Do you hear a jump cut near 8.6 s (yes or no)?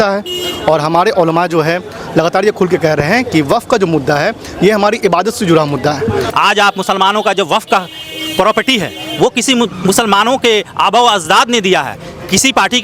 no